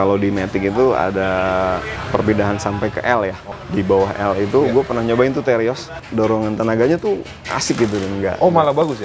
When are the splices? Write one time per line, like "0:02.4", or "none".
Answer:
0:01.9
0:03.5
0:06.0